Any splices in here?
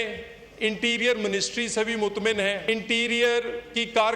yes; 1 cut; at 2.6 s

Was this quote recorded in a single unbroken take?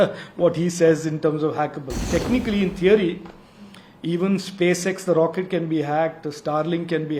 no; 1 cut; at 2.0 s

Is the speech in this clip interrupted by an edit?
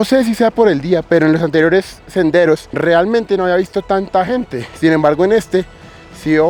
no; 0 cuts

